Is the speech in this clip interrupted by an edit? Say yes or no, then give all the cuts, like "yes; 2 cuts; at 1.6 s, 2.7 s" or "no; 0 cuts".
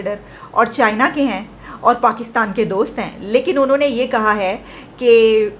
no; 0 cuts